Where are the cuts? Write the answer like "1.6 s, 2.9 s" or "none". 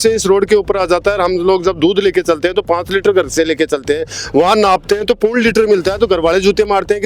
none